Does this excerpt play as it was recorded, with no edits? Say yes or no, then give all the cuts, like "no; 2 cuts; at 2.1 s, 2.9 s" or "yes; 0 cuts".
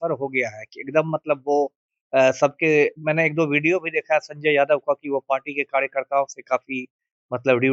yes; 0 cuts